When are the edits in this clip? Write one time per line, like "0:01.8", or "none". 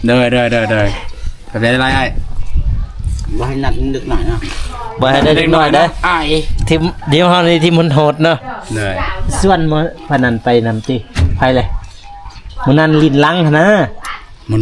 none